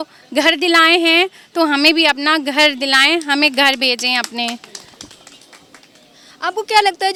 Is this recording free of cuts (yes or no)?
yes